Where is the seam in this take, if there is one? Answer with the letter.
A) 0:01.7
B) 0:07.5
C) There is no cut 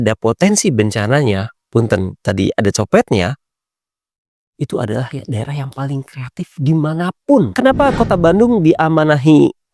B